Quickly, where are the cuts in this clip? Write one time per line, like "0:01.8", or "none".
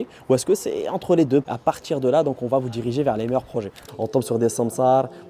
0:03.8